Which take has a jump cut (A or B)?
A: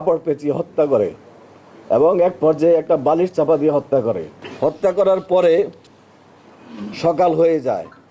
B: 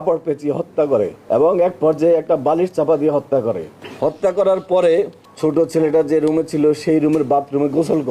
B